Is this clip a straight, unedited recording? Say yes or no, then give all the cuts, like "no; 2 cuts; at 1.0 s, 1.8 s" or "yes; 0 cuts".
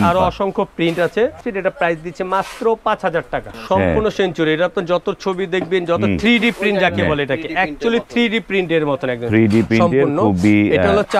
no; 2 cuts; at 1.4 s, 3.5 s